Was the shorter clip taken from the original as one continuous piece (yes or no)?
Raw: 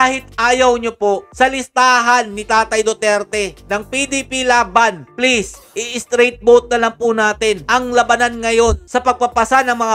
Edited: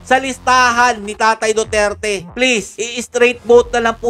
no